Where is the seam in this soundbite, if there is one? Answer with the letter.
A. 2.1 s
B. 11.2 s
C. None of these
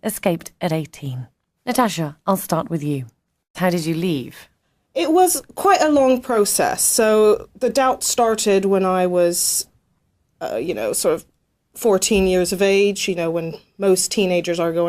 B